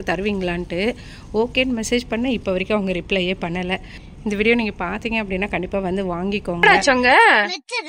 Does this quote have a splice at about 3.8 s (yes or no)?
no